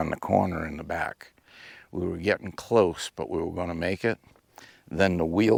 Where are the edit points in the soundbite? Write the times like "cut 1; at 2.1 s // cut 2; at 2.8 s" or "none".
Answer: none